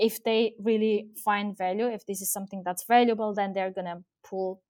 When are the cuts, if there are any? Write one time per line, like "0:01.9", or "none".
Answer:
none